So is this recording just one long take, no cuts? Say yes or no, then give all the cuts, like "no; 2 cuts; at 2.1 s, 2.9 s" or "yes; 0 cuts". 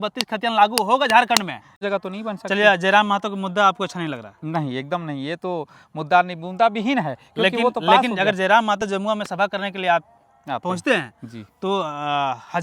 no; 1 cut; at 1.7 s